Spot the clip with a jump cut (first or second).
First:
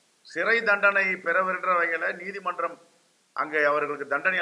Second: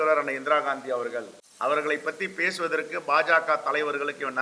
second